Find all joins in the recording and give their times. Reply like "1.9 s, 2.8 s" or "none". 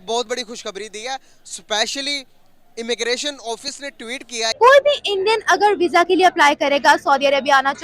4.4 s